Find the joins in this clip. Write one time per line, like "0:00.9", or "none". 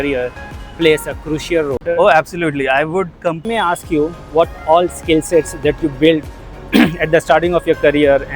0:01.8
0:03.5